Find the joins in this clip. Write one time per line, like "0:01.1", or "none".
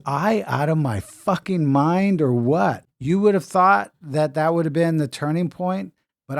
0:02.9